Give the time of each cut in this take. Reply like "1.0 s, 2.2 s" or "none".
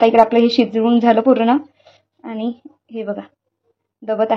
none